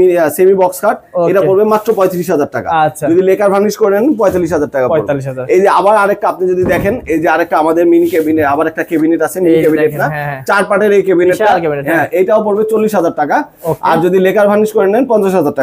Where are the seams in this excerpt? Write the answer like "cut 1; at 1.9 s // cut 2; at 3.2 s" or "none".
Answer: none